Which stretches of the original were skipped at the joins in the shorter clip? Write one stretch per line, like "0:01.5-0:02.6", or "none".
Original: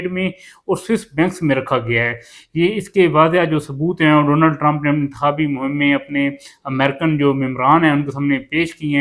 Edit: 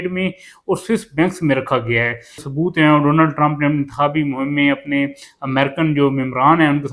0:02.4-0:03.7